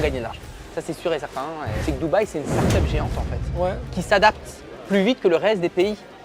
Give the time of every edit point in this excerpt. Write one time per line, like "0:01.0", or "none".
0:01.7